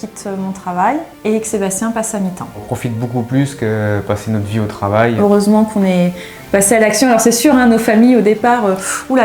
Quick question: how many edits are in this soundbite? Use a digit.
3